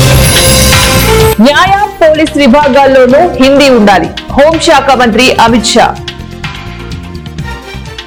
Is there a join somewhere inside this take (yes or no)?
no